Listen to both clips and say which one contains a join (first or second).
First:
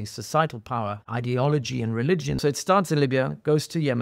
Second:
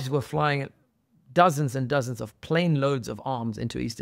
first